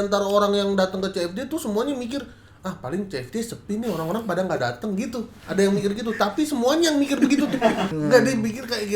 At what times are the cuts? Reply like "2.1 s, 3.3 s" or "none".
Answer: 7.9 s